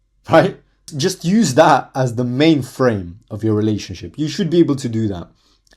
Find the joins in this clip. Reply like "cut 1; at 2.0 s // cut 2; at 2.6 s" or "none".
cut 1; at 0.9 s